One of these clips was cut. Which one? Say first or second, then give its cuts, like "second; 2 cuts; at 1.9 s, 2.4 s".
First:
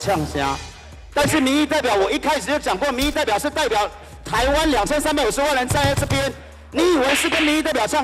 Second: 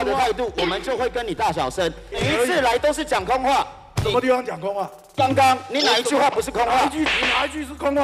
second; 3 cuts; at 2.1 s, 3.8 s, 7.1 s